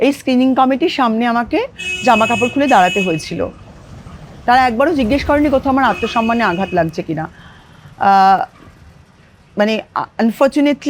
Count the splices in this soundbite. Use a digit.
0